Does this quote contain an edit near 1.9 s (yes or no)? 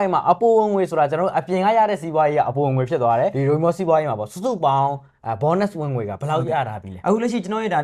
no